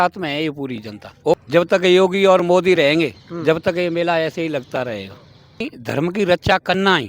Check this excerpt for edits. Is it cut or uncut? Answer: cut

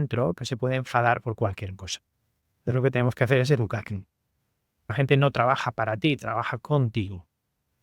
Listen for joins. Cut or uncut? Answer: cut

